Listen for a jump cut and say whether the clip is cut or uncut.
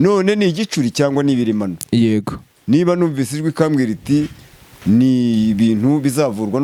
uncut